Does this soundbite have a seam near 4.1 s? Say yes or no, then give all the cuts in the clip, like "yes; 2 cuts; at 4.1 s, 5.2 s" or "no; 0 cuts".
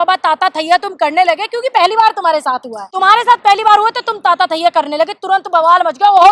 no; 1 cut; at 2.8 s